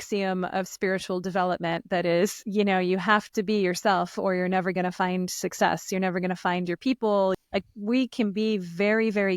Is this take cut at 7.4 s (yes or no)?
yes